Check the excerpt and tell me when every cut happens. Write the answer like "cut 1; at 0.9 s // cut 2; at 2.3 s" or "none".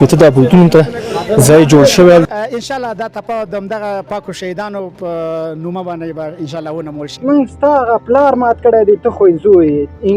cut 1; at 2.2 s // cut 2; at 7.1 s